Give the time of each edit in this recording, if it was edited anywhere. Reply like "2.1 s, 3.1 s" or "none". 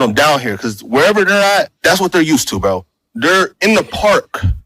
1.7 s

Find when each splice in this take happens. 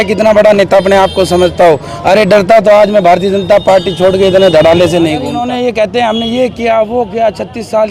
5.3 s

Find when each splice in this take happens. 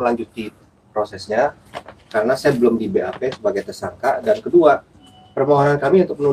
none

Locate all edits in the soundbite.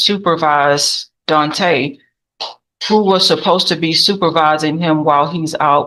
none

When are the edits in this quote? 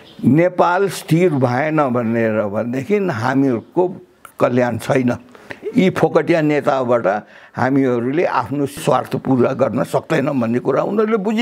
8.8 s

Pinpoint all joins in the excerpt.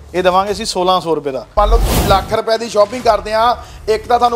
1.5 s

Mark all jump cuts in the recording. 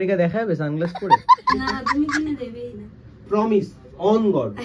1.0 s, 1.5 s

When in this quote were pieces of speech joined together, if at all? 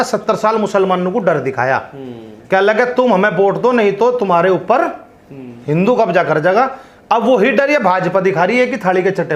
none

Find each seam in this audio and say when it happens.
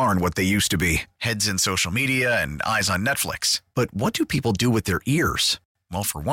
none

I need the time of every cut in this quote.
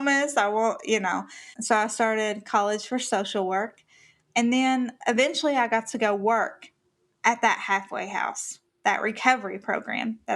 5.0 s

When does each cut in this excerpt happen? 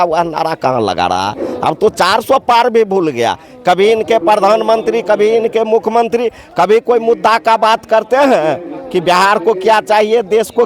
none

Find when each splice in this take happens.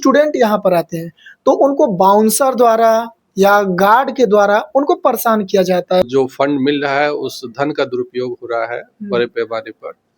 6.0 s

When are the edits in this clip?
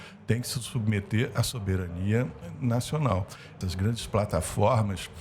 3.4 s

